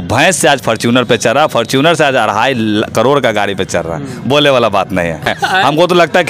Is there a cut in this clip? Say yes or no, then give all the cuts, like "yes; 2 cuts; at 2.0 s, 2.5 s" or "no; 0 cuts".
yes; 1 cut; at 5.3 s